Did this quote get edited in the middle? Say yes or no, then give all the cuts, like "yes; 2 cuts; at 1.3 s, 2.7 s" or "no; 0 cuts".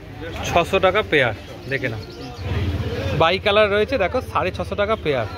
yes; 1 cut; at 2.4 s